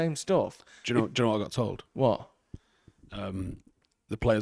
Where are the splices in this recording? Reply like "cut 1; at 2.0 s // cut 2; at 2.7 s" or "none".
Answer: none